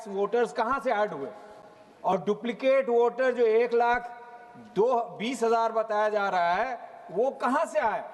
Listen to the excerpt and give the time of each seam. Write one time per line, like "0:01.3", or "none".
none